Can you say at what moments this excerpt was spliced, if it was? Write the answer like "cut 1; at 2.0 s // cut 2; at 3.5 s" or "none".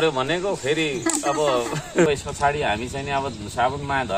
cut 1; at 2.1 s